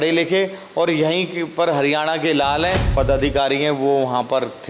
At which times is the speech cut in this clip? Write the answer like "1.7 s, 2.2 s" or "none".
2.9 s